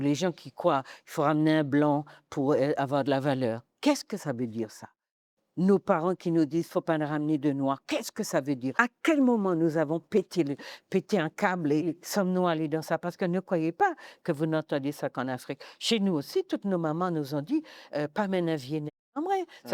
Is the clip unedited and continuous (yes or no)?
no